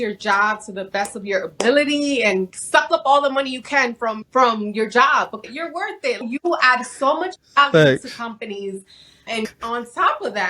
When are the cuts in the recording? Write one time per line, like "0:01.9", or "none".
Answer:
0:02.5
0:04.2
0:05.7
0:09.5